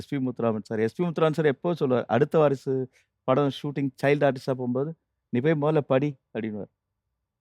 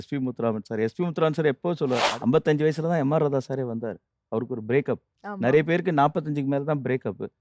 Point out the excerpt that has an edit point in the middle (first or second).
second